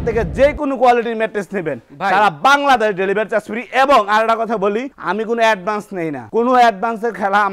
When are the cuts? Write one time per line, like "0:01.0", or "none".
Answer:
none